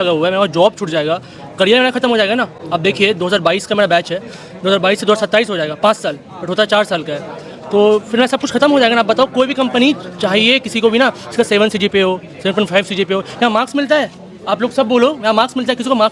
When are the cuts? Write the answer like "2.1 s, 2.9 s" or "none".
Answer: none